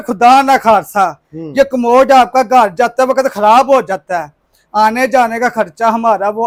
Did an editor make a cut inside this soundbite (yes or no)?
no